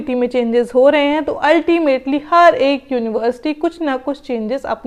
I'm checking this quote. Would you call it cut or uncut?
uncut